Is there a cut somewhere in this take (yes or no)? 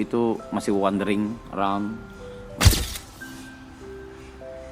yes